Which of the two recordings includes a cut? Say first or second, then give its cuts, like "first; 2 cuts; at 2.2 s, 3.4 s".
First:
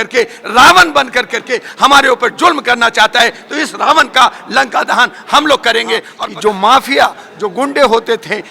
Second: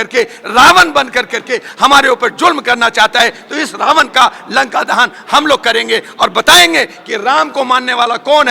first; 1 cut; at 6.2 s